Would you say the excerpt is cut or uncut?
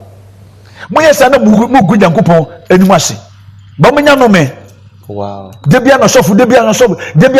uncut